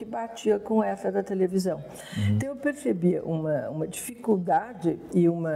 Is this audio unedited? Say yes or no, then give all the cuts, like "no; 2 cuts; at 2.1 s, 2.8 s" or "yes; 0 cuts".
yes; 0 cuts